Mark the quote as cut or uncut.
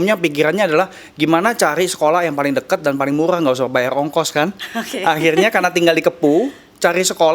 uncut